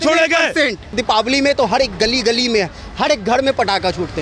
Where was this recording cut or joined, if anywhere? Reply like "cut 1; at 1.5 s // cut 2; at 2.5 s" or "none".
cut 1; at 0.9 s